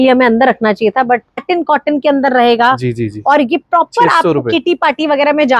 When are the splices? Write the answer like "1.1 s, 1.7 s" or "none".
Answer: 1.4 s

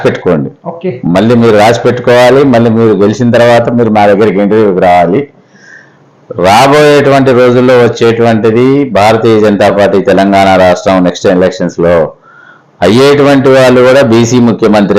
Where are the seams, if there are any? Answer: none

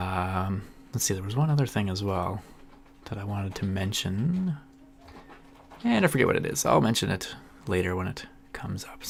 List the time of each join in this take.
none

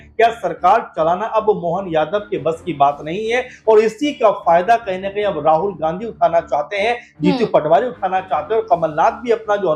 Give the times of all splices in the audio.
none

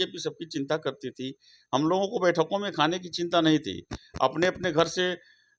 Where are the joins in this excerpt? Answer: none

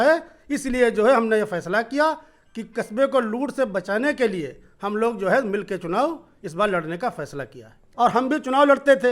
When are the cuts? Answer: 7.9 s

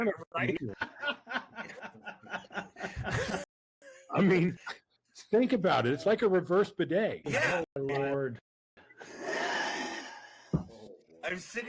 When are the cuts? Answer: 7.2 s

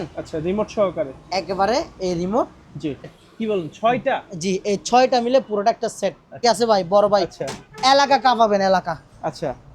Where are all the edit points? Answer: 3.3 s, 6.4 s

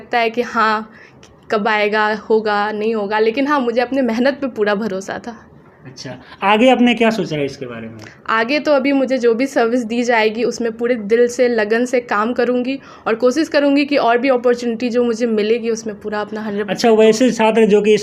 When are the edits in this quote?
none

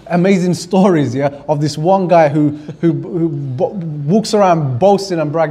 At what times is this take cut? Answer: none

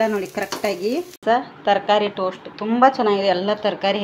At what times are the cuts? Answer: 1.2 s

